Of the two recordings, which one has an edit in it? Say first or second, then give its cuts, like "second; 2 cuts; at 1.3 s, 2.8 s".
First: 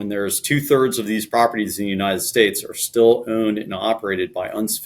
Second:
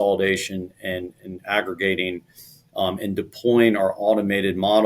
first; 1 cut; at 1.3 s